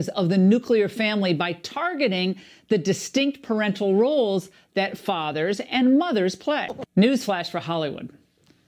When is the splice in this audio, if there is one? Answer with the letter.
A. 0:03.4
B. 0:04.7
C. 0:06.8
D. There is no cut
C